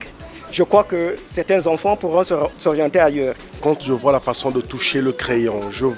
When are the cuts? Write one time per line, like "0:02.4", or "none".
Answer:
0:03.6